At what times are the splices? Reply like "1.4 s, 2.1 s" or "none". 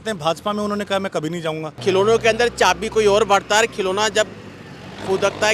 1.7 s